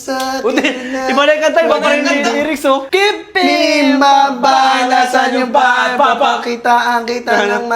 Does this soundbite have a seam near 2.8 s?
yes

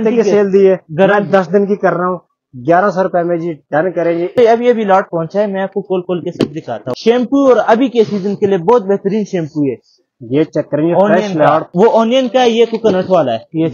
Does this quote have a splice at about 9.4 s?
no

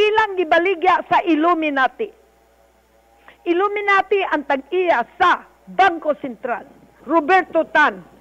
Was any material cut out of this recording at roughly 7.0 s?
yes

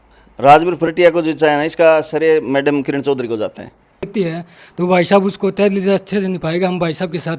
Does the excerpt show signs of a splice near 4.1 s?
yes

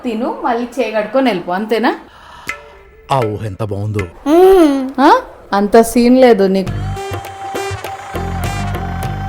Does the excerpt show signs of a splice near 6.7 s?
yes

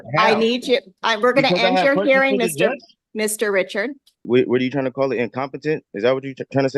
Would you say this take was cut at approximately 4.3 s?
yes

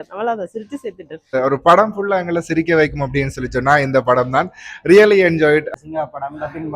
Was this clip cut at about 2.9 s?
no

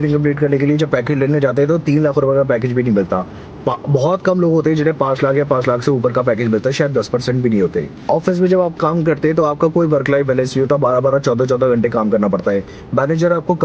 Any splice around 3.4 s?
no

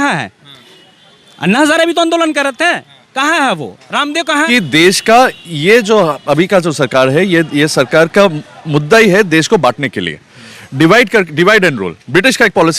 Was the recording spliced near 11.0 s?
no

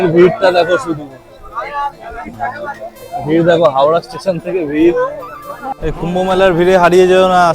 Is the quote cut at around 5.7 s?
yes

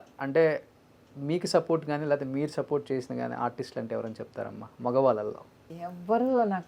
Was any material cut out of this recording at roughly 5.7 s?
yes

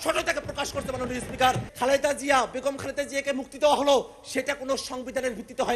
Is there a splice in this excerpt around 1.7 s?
yes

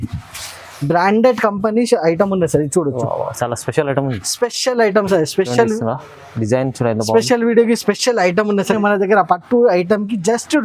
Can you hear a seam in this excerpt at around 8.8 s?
yes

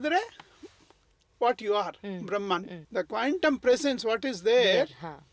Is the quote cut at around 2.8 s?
yes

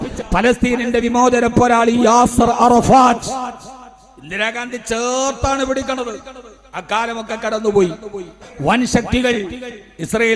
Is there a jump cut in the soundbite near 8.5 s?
yes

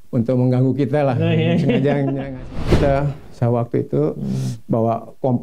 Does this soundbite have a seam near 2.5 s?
yes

